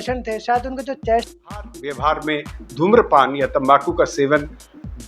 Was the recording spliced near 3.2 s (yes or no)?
no